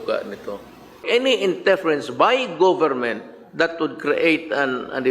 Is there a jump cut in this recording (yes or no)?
yes